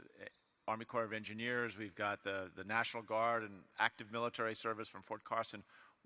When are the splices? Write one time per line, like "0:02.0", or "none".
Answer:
0:02.0